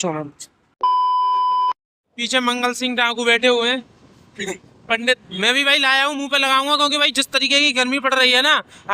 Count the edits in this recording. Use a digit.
2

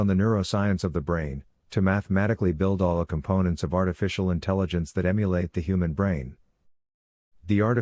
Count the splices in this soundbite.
0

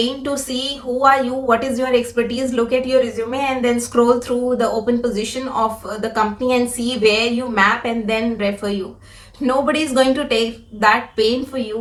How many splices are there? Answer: 0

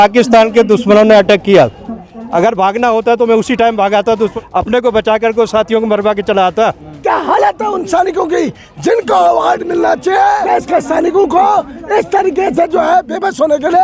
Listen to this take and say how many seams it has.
4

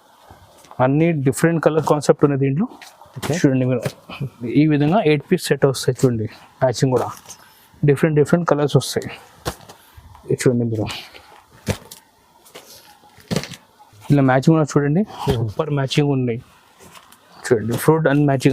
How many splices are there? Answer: 2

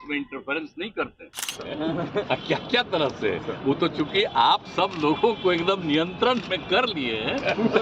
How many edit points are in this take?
1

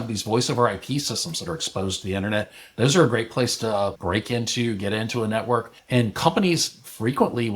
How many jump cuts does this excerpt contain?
2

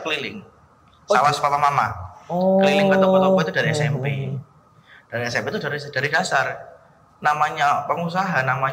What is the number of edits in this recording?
0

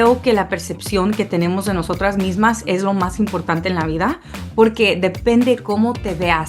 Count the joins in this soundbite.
0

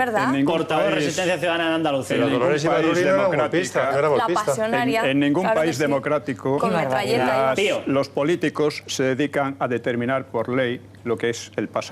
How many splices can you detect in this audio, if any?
1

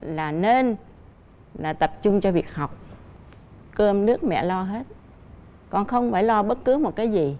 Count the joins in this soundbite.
0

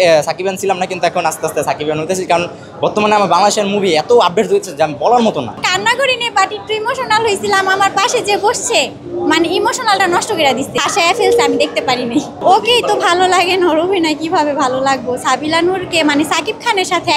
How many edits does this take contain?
3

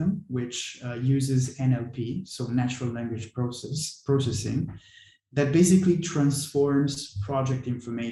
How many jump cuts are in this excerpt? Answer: 0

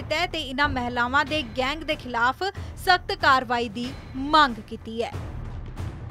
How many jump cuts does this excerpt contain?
1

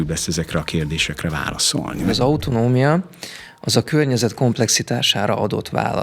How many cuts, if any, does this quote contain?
1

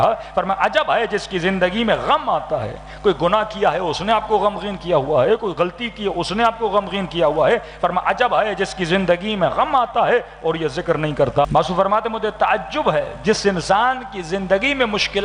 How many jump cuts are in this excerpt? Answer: 1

